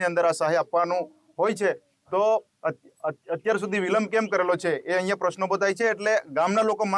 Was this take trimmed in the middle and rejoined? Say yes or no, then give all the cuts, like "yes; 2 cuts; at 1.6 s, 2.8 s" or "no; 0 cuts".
no; 0 cuts